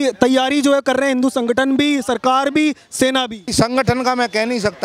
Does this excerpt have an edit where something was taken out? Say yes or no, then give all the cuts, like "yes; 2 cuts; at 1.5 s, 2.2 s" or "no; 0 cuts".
yes; 1 cut; at 3.5 s